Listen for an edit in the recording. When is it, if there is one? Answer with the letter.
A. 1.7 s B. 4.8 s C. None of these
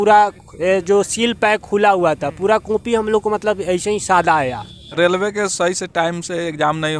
B